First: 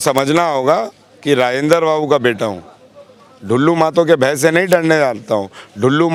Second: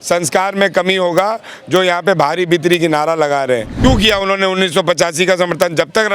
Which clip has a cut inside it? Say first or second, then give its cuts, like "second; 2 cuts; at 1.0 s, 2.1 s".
second; 1 cut; at 3.7 s